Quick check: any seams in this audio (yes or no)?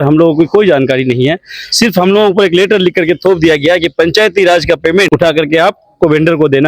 yes